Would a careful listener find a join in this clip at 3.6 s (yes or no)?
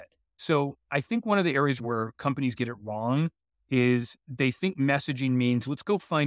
no